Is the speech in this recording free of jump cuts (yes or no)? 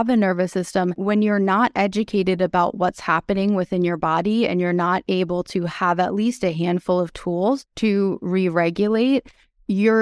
no